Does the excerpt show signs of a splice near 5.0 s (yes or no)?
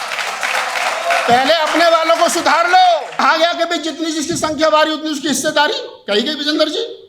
no